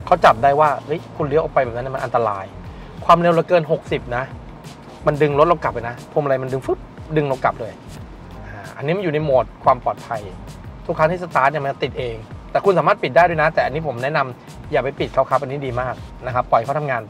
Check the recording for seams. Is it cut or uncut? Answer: uncut